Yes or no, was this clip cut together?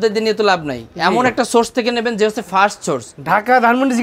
yes